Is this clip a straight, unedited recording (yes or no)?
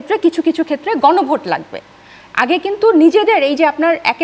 yes